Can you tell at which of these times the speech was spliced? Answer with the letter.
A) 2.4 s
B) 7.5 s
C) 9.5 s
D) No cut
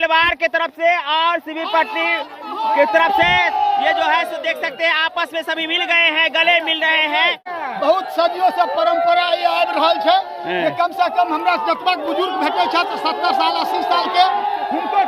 B